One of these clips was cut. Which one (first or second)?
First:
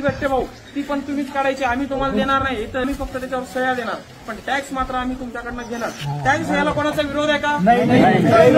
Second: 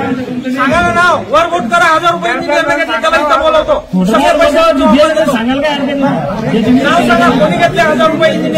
first